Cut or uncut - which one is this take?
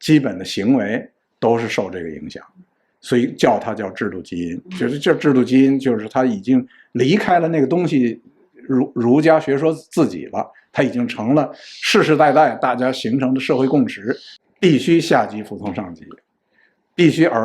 cut